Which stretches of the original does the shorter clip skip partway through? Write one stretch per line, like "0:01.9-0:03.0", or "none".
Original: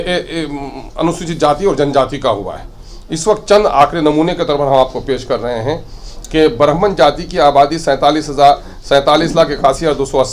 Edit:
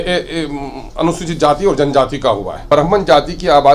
0:02.7-0:06.6